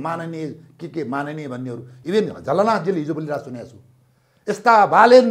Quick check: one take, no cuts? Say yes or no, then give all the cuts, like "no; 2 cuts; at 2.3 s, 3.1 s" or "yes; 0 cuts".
yes; 0 cuts